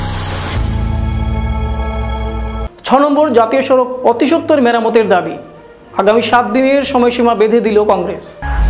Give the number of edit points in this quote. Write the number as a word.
one